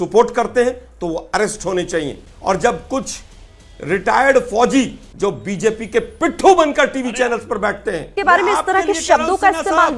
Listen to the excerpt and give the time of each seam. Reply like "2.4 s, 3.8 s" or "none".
2.2 s, 5.0 s, 8.1 s

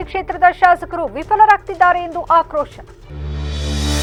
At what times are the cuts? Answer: none

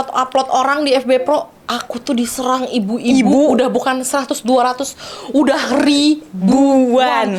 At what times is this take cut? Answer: none

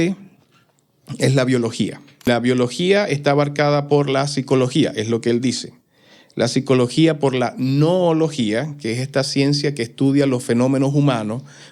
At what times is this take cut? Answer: 2.3 s

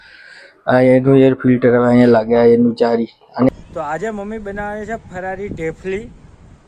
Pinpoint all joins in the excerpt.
3.5 s

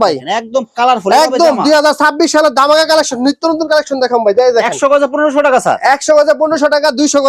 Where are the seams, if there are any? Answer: none

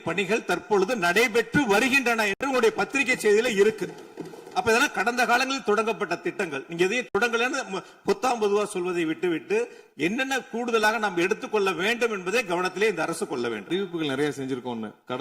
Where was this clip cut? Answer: 13.7 s

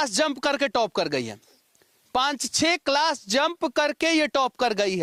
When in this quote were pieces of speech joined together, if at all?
none

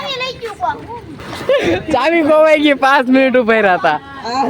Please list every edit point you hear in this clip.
1.2 s

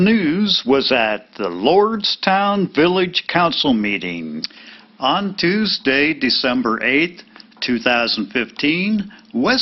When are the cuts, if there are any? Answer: 4.8 s

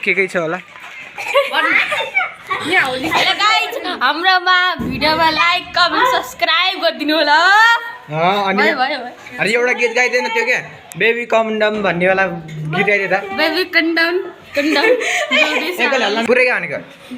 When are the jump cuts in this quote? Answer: 1.3 s, 16.2 s

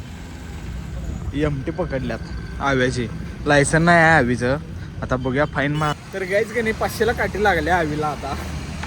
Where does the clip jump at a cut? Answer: 5.9 s

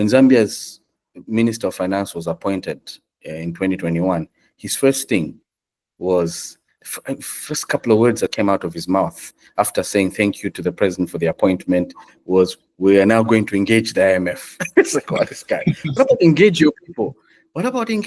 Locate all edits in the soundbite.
none

